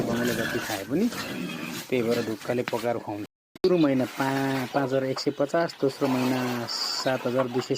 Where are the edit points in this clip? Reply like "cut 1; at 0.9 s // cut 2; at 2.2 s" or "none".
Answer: cut 1; at 3.6 s